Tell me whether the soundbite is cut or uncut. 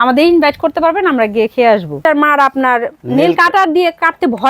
cut